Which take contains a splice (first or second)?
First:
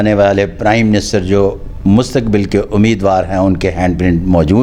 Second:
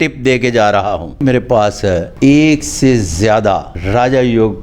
second